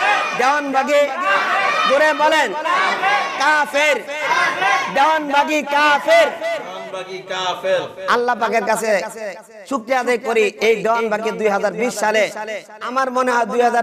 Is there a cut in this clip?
no; 0 cuts

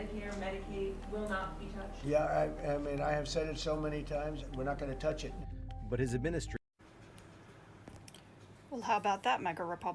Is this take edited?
yes; 1 cut; at 6.5 s

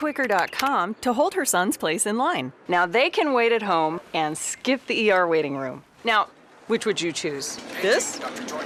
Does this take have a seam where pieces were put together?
no; 0 cuts

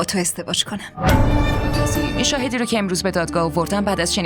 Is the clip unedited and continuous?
no; 1 cut; at 2.1 s

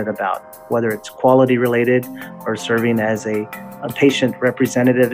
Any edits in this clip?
yes; 1 cut; at 3.7 s

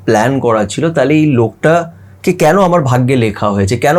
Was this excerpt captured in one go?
yes; 0 cuts

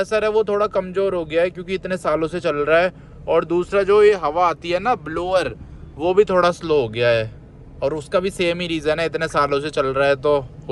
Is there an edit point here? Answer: no; 0 cuts

